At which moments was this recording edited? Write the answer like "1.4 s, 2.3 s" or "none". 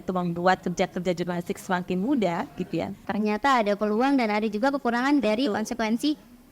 3.1 s

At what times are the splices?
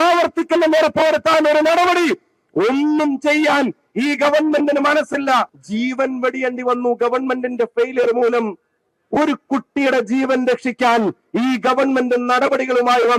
5.6 s

